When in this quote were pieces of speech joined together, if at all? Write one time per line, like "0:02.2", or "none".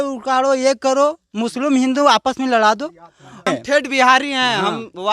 0:03.5

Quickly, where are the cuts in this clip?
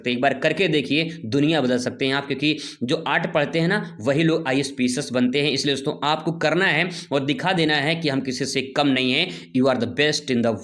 none

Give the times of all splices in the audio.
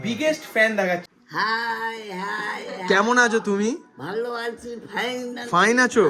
0:01.1

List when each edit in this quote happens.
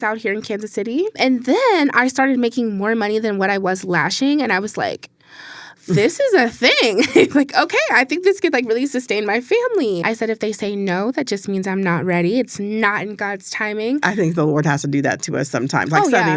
0:01.2
0:10.0
0:14.0

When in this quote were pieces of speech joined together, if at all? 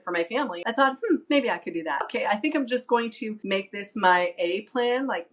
0:01.2

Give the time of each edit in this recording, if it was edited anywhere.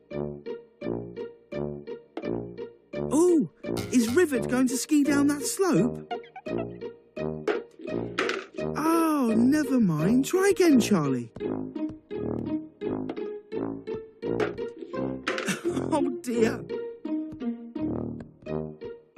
0:17.7

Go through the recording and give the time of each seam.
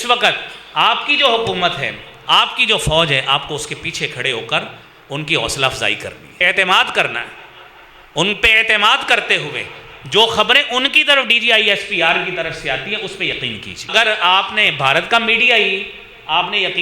0:06.4
0:13.9

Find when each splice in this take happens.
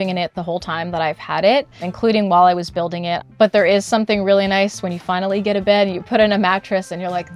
0:01.8
0:03.3

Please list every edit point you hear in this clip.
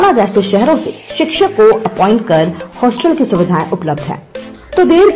none

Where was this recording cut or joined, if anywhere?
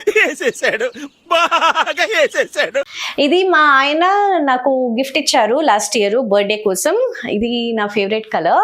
0:03.0

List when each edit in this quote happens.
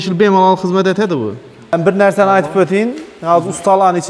0:01.7

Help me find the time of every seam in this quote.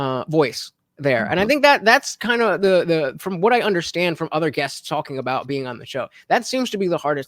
none

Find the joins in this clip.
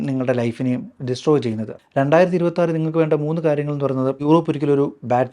0:01.7
0:04.2

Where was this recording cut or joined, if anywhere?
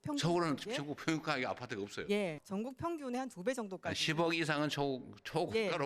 0:02.4

